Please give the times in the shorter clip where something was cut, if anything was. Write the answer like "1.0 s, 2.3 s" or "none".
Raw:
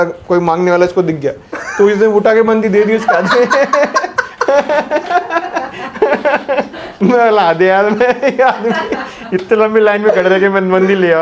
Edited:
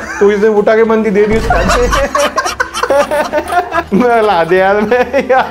3.8 s